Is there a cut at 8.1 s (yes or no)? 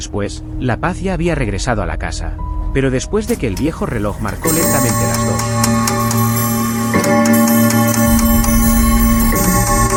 no